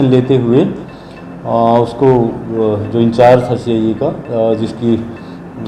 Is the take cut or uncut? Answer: uncut